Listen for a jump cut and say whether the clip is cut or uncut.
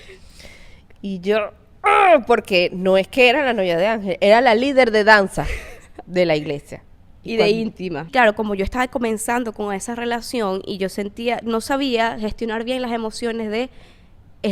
cut